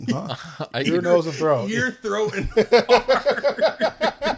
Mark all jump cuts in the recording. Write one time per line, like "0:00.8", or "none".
none